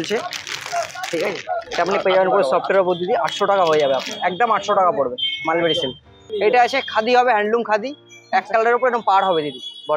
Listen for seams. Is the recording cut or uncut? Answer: uncut